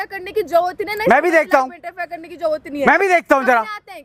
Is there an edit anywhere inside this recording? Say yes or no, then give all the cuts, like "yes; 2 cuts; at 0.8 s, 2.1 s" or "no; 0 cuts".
no; 0 cuts